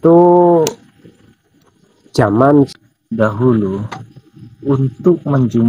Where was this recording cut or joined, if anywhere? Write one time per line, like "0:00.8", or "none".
0:02.7